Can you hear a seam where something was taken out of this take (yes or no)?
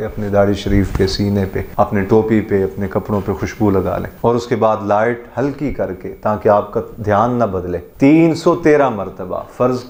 yes